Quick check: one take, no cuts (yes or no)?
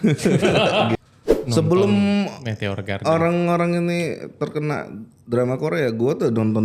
no